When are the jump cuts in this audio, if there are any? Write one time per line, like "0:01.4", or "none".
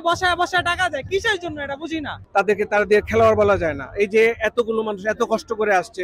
0:02.1

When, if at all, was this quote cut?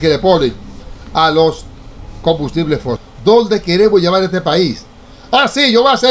0:03.1

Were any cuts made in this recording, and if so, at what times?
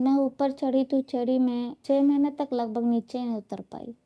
0:01.7

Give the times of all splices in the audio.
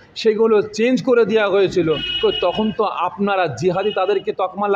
none

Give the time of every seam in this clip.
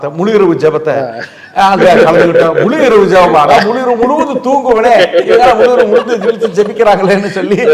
none

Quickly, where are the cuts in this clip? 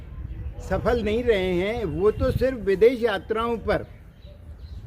none

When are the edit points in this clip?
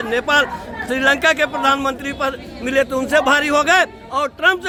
none

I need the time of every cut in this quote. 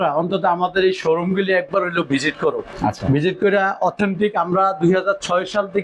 0:02.7

